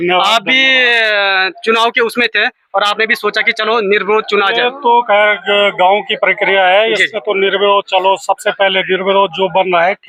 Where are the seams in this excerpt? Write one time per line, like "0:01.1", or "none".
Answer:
none